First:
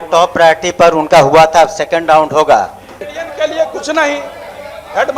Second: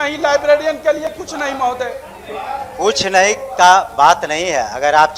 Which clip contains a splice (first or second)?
first